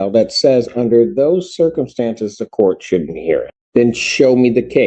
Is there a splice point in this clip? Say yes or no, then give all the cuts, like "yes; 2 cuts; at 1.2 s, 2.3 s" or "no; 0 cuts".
yes; 1 cut; at 3.6 s